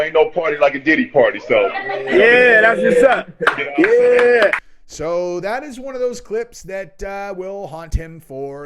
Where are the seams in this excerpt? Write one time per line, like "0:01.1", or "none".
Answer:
0:04.6